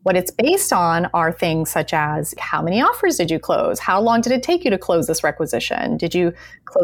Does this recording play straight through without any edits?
no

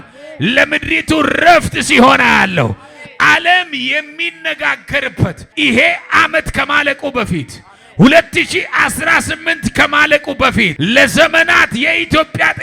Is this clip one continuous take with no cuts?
no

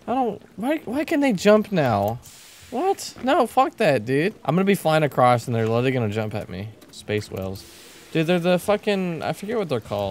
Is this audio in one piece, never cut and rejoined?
no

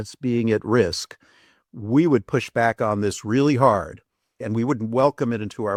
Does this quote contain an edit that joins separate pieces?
no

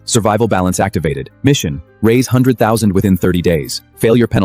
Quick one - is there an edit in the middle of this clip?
no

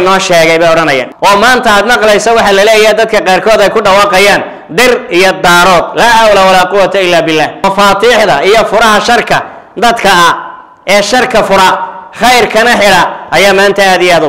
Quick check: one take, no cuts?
no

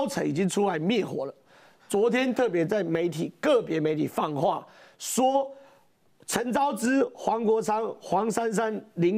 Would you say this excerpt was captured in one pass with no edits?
yes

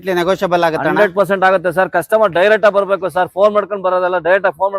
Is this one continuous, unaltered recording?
yes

